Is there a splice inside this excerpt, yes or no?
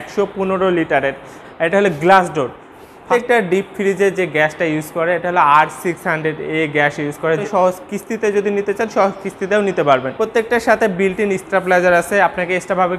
yes